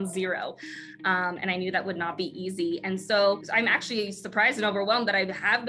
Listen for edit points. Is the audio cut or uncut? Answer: cut